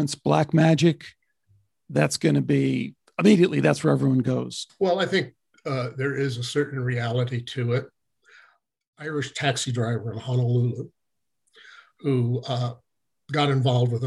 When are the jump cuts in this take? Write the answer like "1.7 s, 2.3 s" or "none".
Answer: 4.6 s, 8.9 s